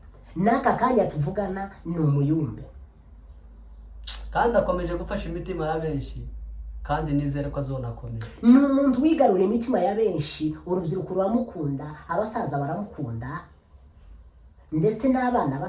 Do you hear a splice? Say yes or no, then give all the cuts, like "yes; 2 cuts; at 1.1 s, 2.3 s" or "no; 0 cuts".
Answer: no; 0 cuts